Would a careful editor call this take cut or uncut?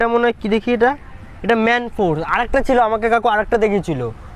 uncut